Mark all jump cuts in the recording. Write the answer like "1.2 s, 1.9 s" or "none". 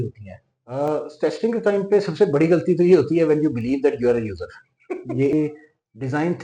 5.3 s